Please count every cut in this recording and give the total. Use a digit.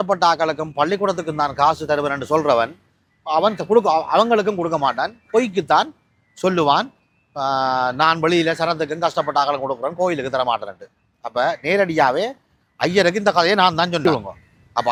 0